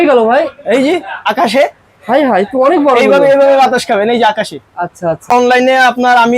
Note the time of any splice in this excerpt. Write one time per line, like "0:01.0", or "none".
0:05.3